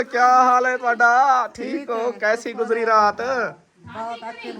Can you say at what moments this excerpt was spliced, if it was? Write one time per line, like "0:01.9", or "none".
none